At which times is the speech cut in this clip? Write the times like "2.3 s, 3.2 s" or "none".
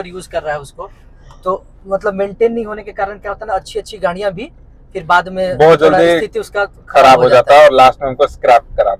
none

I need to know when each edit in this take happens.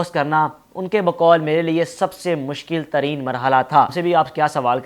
3.9 s

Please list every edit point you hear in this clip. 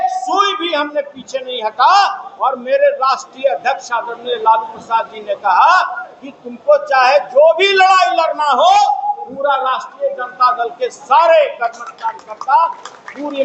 none

